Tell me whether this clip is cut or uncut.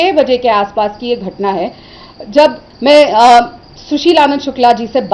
cut